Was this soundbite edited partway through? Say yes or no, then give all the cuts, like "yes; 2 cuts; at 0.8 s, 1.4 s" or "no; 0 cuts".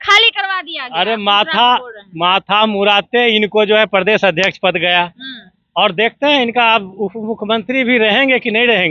no; 0 cuts